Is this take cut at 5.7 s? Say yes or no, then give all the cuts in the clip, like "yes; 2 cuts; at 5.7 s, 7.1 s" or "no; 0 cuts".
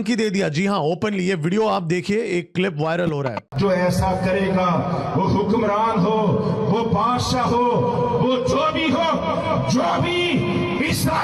no; 1 cut; at 3.5 s